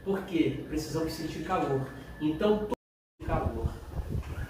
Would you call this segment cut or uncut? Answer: cut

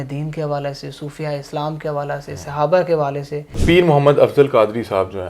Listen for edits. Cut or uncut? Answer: cut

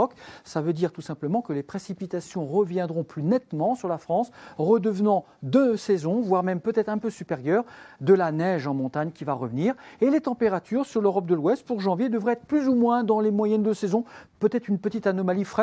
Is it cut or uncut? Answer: cut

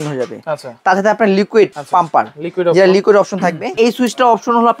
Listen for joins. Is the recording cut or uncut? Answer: cut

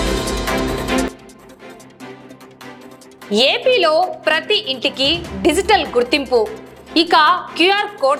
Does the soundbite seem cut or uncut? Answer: uncut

